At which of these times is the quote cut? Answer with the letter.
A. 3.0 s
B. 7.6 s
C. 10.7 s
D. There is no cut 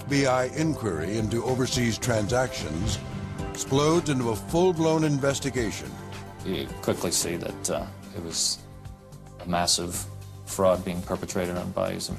C